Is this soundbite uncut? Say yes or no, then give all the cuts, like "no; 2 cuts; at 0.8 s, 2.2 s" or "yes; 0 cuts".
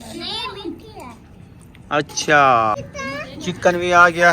no; 1 cut; at 2.9 s